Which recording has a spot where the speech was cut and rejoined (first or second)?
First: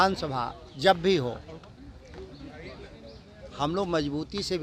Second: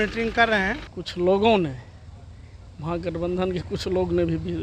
second